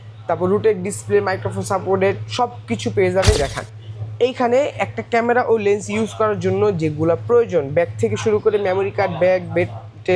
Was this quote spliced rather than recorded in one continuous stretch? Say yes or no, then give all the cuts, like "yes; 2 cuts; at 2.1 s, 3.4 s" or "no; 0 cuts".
yes; 1 cut; at 3.4 s